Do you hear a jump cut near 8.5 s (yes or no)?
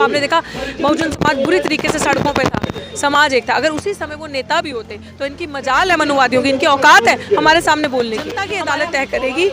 yes